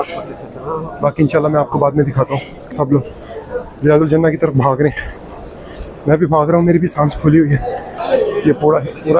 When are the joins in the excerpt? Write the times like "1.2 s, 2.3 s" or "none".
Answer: 2.7 s, 8.0 s